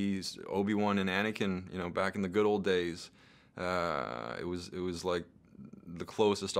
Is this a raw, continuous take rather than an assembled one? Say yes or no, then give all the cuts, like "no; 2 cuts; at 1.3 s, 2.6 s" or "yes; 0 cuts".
yes; 0 cuts